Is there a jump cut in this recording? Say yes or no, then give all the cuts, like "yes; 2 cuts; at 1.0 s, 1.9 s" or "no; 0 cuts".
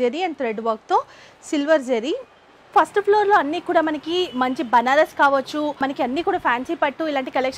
yes; 2 cuts; at 2.7 s, 5.8 s